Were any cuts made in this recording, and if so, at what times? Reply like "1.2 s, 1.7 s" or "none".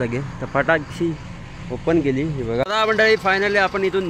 2.6 s